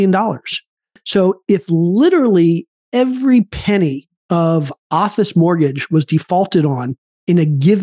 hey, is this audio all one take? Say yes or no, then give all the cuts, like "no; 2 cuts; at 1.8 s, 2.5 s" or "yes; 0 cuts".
yes; 0 cuts